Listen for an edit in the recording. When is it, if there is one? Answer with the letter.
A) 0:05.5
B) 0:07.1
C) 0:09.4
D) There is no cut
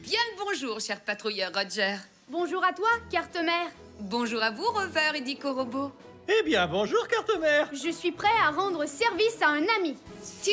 D